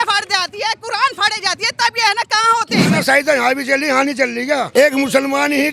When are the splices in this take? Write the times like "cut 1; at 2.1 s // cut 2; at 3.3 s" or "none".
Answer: cut 1; at 2.9 s // cut 2; at 4.7 s